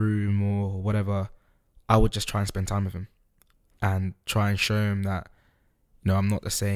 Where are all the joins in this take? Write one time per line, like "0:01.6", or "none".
none